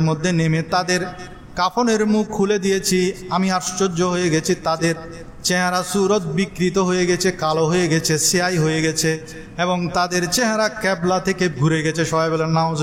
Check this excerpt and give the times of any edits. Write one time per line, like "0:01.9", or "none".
0:11.5

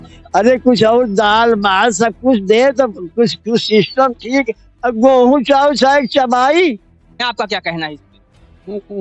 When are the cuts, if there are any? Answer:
0:07.2

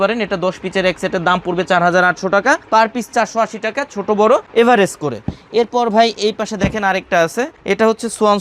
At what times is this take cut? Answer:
none

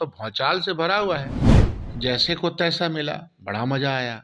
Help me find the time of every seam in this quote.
0:01.6

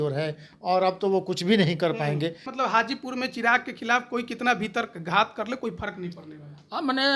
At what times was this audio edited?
0:02.5

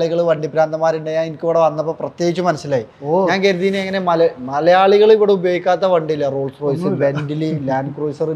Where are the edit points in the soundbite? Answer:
none

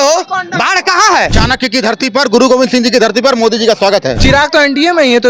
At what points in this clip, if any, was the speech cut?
0:01.3
0:04.2

